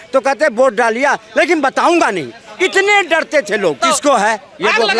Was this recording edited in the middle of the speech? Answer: yes; 1 cut; at 3.8 s

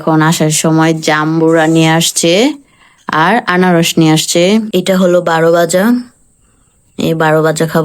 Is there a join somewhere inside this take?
yes; 1 cut; at 4.7 s

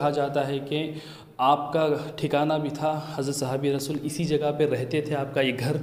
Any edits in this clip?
no; 0 cuts

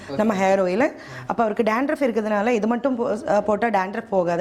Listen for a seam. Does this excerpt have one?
no; 0 cuts

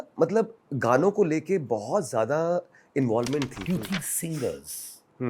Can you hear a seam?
yes; 1 cut; at 3.6 s

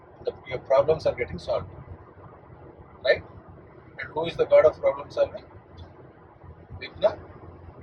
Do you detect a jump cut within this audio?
no; 0 cuts

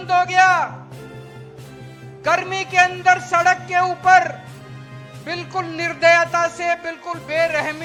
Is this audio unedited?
yes; 0 cuts

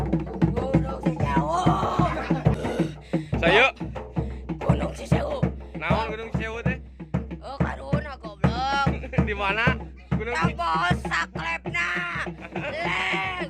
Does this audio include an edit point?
yes; 1 cut; at 2.5 s

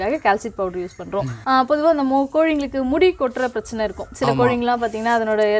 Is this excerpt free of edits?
no; 1 cut; at 1.4 s

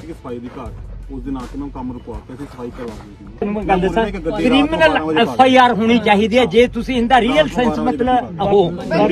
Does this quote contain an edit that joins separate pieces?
yes; 1 cut; at 3.4 s

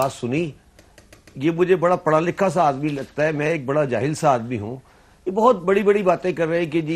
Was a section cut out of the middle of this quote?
no; 0 cuts

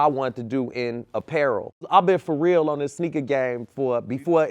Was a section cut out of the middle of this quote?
yes; 1 cut; at 1.9 s

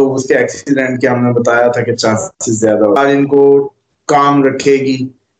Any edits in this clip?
yes; 1 cut; at 3.0 s

